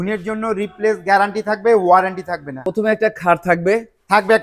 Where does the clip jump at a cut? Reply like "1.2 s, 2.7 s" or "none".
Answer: 2.6 s